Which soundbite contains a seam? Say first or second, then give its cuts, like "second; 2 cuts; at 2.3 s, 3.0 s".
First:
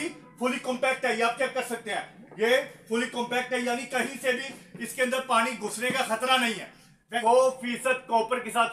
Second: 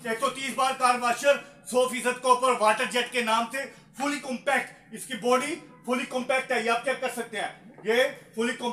first; 1 cut; at 7.2 s